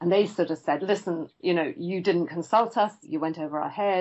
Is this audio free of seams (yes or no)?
no